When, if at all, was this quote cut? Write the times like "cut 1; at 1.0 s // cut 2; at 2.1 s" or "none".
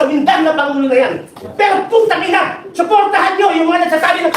cut 1; at 1.5 s